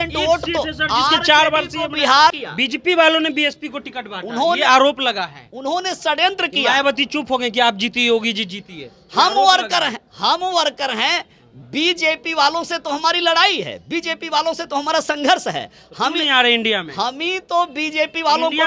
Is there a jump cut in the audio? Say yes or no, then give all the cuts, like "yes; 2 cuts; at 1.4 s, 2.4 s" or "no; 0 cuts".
yes; 1 cut; at 2.4 s